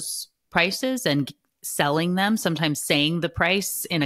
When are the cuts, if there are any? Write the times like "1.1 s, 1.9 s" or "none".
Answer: none